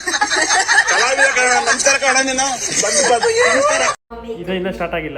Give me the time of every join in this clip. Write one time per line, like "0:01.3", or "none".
0:04.1